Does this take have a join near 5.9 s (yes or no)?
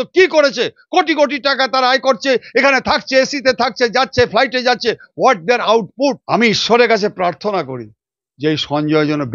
yes